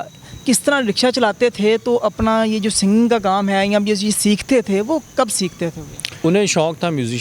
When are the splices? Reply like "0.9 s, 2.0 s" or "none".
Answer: 6.2 s